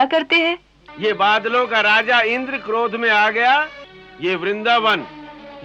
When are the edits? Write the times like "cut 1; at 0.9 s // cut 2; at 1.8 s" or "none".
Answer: cut 1; at 0.8 s // cut 2; at 4.1 s